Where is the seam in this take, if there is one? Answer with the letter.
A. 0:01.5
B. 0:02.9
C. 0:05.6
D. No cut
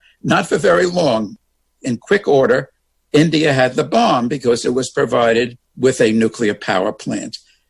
C